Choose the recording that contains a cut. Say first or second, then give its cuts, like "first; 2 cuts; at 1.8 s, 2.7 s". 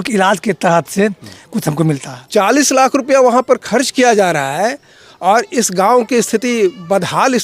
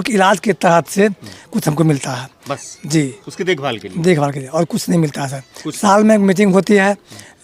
first; 1 cut; at 2.1 s